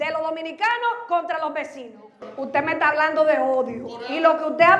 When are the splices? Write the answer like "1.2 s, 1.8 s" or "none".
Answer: 2.2 s